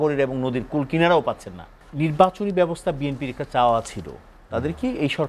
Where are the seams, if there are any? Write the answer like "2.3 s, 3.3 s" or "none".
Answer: 1.8 s